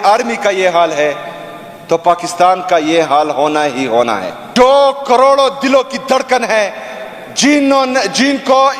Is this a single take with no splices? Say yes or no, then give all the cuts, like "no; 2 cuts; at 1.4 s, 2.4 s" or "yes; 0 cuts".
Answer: no; 1 cut; at 4.4 s